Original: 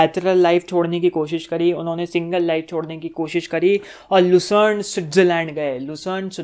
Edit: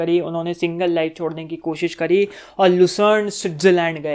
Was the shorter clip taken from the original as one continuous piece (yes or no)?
yes